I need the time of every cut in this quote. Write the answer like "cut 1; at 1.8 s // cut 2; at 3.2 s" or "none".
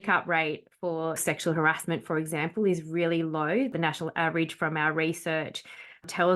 cut 1; at 1.2 s // cut 2; at 3.7 s